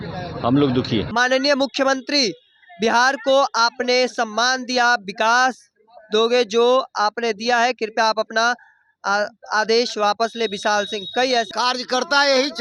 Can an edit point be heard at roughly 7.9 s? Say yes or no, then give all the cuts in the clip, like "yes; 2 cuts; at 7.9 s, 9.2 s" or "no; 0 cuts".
no; 2 cuts; at 1.1 s, 11.5 s